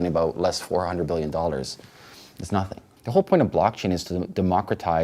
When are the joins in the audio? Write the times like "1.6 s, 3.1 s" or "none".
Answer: 2.9 s